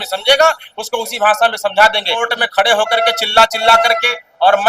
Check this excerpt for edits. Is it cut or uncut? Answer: cut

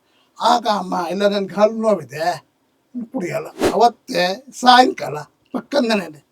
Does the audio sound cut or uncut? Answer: cut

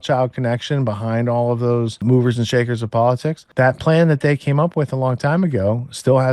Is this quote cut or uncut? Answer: cut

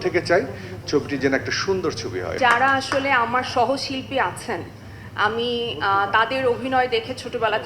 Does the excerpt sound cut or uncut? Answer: cut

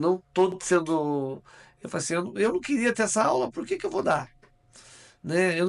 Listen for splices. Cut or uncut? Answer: uncut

